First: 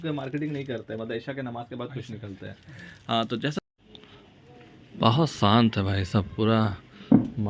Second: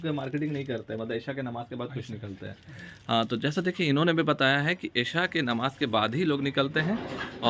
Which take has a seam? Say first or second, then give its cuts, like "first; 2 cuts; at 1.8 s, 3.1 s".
first; 1 cut; at 3.6 s